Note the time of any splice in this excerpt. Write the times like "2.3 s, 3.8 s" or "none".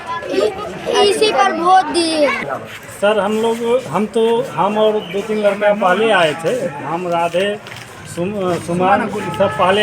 2.4 s